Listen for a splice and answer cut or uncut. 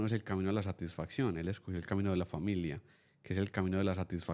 uncut